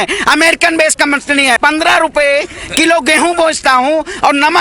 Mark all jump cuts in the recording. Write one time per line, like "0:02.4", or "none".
0:01.6